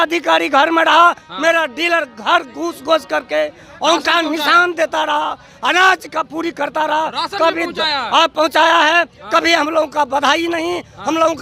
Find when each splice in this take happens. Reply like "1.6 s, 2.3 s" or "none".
none